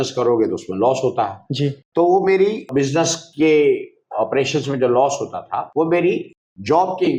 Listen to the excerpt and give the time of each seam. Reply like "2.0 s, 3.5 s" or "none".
none